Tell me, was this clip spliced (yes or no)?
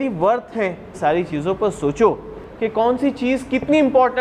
yes